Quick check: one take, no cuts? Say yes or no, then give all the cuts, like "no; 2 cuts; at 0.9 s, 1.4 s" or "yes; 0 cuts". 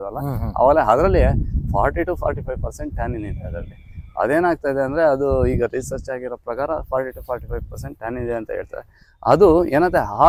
yes; 0 cuts